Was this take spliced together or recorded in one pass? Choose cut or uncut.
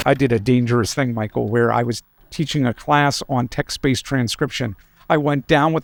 uncut